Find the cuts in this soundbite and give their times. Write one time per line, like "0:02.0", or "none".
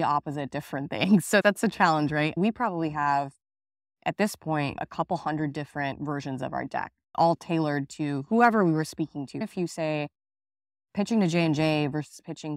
0:02.3
0:09.4